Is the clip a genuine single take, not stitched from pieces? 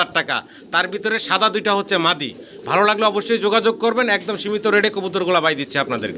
yes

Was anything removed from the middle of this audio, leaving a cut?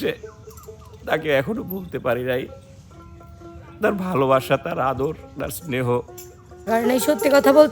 yes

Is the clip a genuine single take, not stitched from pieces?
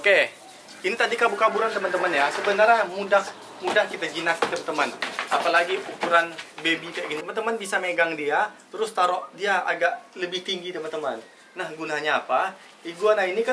no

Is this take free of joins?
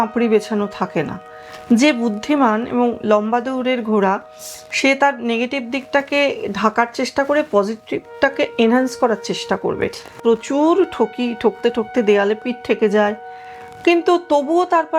no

